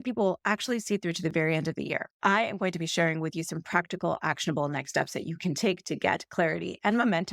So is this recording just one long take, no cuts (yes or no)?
no